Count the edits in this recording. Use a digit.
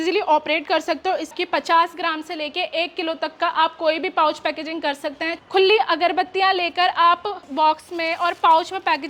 3